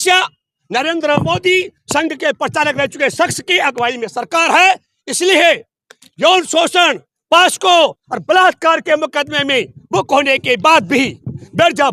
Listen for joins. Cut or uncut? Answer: uncut